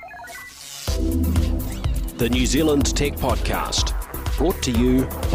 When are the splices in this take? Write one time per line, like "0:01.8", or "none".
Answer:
none